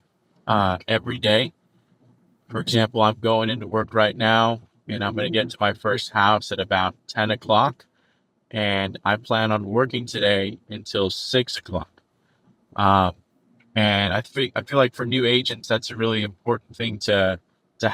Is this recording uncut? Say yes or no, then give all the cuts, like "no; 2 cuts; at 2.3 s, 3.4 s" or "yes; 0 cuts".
yes; 0 cuts